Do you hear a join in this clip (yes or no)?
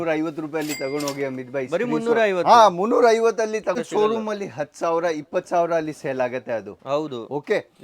yes